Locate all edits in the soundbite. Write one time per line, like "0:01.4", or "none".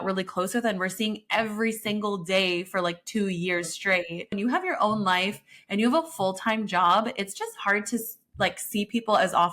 0:04.3